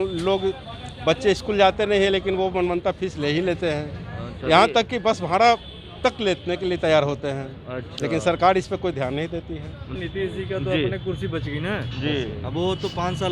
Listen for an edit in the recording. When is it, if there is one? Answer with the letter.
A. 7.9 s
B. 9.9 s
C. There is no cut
B